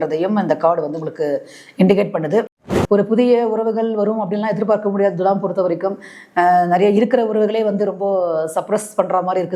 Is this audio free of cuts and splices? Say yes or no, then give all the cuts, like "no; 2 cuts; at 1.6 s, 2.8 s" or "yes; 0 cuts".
no; 1 cut; at 2.5 s